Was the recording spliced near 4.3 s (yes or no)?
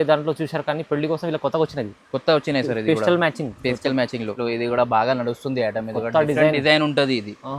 yes